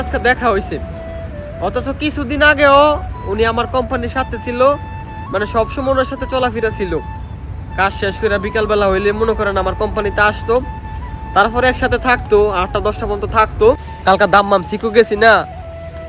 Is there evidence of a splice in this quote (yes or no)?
yes